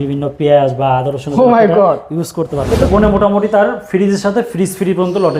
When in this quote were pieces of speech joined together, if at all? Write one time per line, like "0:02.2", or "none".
0:02.9